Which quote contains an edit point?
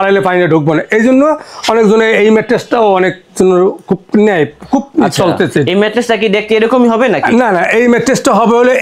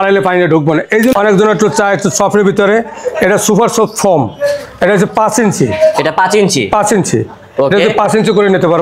second; 1 cut; at 1.1 s

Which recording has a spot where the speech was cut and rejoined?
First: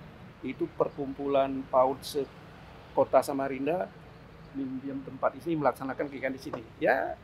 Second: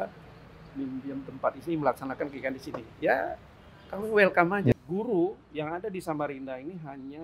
second; 1 cut; at 4.7 s

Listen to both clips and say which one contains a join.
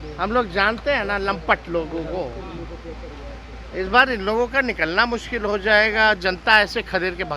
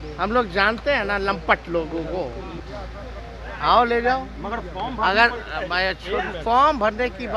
second; 1 cut; at 2.6 s

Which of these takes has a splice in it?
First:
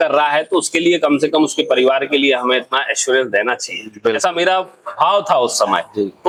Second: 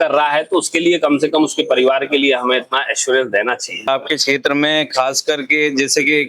second; 1 cut; at 3.9 s

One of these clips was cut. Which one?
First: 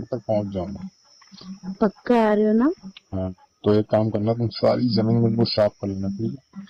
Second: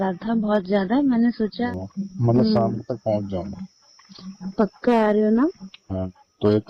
second; 1 cut; at 1.6 s

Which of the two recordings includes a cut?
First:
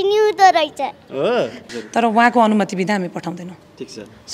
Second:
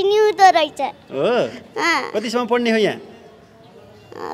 first; 1 cut; at 1.6 s

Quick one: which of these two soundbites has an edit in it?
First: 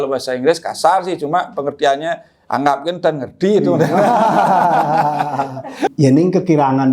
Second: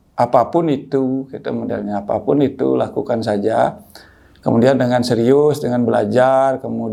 first; 1 cut; at 5.9 s

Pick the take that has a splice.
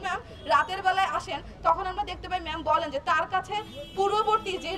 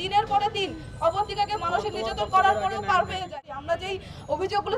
second; 1 cut; at 3.3 s

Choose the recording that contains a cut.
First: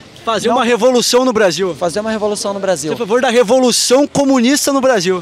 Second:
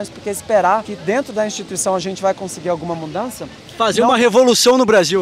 second; 1 cut; at 0.9 s

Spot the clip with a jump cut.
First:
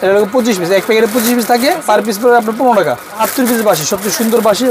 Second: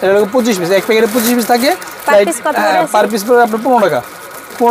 first; 2 cuts; at 1.8 s, 3.2 s

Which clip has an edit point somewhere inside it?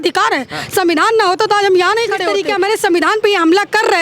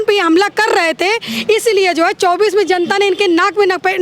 first; 1 cut; at 2.2 s

